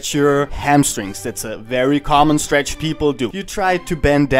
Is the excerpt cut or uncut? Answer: uncut